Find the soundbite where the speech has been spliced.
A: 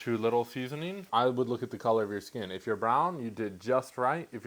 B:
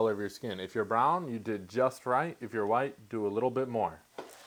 A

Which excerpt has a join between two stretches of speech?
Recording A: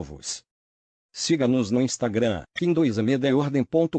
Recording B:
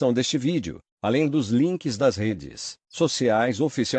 A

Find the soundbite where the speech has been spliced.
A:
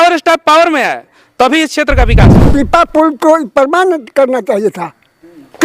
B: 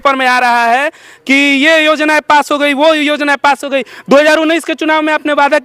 A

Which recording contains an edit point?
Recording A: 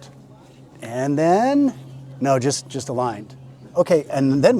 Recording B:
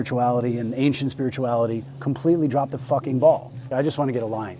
B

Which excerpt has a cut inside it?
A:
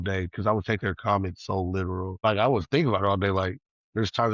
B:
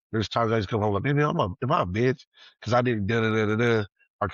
A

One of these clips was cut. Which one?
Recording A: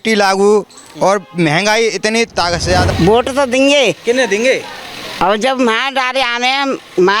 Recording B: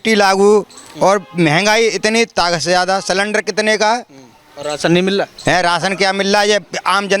A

